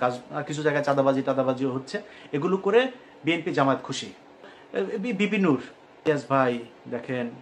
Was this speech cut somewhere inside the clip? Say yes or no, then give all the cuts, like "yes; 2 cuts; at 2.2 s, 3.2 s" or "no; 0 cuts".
yes; 1 cut; at 4.6 s